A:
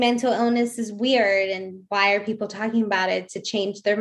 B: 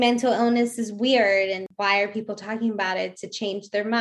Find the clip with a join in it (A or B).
B